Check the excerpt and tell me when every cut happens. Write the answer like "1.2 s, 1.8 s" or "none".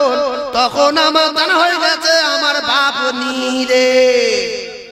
none